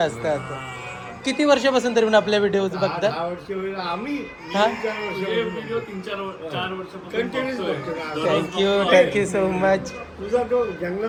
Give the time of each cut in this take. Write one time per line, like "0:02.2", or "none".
none

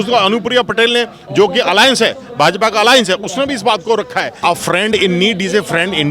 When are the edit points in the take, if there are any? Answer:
0:04.4

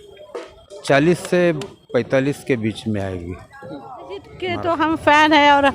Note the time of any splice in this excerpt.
0:04.4

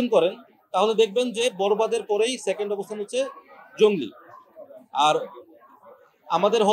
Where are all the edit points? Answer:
none

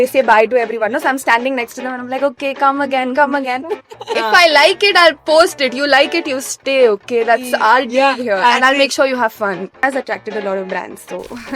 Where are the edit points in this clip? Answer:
0:04.1
0:09.8

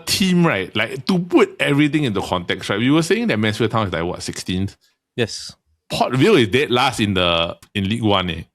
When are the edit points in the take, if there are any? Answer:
0:07.6

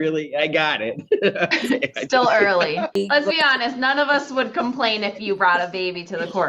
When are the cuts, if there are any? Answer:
0:02.9

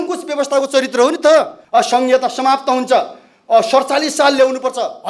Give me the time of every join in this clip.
0:01.6

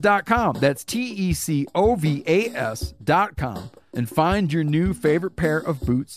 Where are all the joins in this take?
none

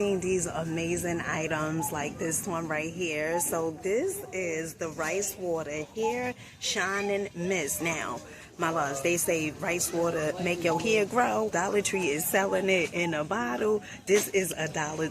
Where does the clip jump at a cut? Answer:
0:11.5

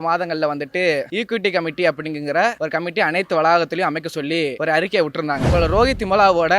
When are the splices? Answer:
0:01.1
0:02.6
0:04.6
0:05.4

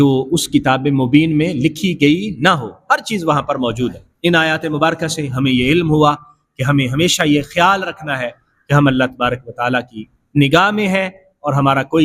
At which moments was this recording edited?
0:04.1

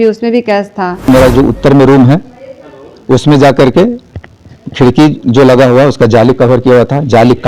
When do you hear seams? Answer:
0:01.1

